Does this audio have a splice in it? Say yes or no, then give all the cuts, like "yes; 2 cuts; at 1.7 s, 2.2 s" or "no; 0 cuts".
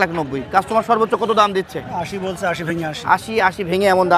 no; 0 cuts